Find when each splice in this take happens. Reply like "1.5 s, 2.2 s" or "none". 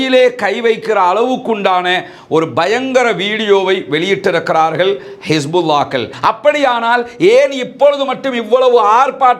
6.1 s